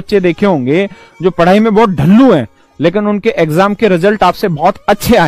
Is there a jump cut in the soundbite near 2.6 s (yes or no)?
no